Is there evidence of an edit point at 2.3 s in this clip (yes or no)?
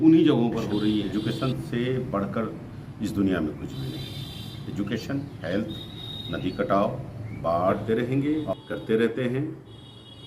no